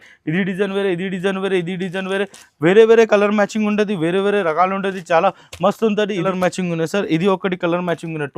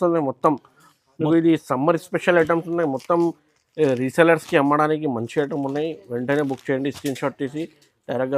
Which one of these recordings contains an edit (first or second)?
first